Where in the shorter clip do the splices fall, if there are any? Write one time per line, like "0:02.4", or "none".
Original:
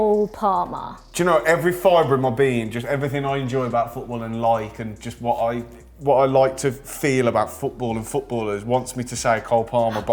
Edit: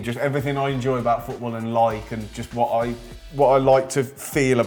none